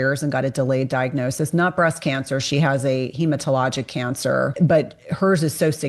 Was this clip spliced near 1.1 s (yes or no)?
no